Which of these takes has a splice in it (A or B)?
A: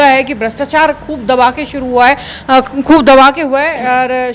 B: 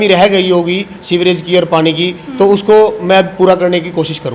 B